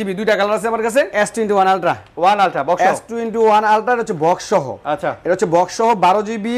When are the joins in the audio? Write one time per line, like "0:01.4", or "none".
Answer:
0:01.1